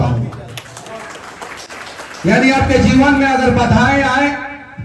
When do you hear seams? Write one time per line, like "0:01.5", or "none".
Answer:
none